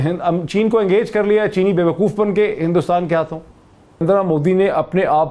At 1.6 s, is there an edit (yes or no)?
no